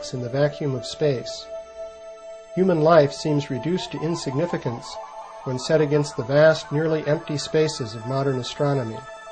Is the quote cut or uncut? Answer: cut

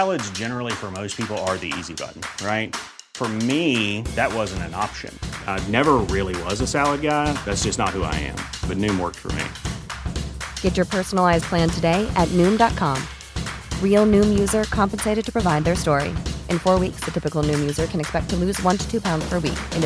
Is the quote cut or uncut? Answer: uncut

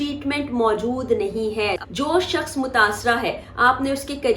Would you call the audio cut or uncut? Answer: cut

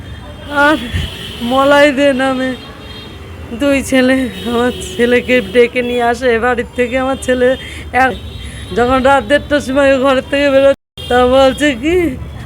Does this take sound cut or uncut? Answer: cut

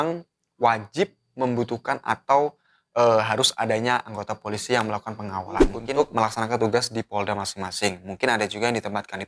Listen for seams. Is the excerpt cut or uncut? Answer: cut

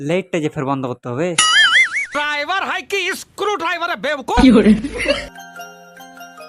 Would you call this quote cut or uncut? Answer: uncut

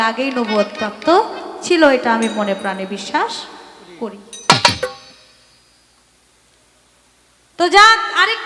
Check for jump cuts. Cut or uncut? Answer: uncut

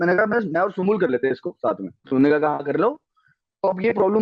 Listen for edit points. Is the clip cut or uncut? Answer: cut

